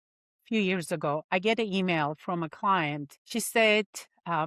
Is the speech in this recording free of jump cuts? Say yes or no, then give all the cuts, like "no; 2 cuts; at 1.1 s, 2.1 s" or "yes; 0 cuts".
no; 1 cut; at 3.1 s